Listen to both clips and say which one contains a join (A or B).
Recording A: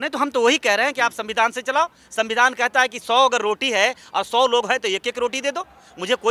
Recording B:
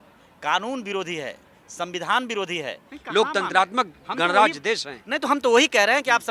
B